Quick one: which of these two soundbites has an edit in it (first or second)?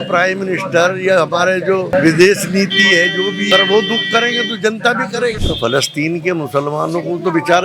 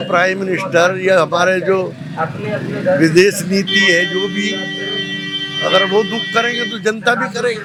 first